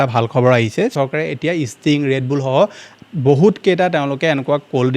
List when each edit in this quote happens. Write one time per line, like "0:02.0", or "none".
0:00.9